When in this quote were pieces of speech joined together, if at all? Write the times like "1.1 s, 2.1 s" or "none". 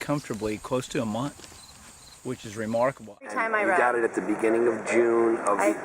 3.3 s